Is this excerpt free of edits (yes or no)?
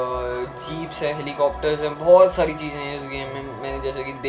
yes